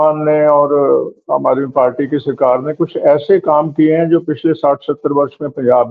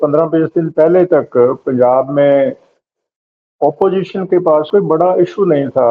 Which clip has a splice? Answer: second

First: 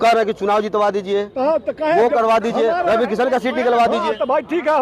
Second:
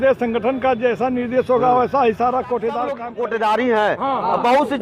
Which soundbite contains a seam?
second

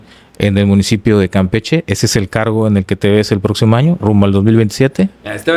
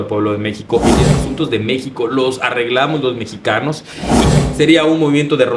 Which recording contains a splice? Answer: second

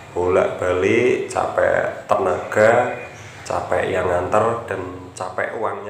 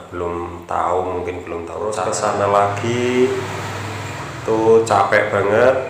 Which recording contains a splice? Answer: second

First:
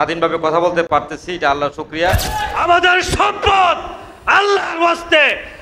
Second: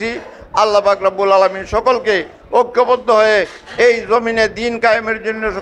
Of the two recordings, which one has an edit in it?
first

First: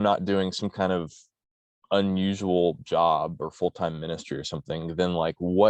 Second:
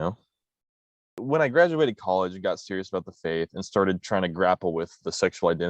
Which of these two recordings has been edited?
second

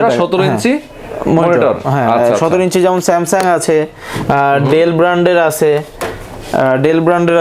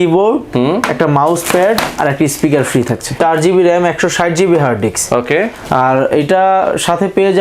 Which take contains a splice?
second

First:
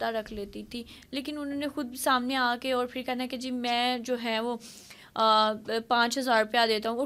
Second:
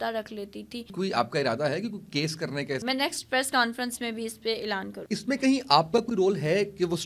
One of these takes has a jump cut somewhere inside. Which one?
second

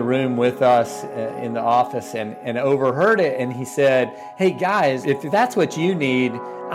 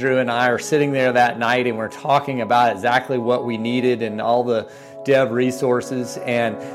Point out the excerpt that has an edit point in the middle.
first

